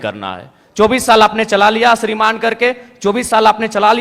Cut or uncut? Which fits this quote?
uncut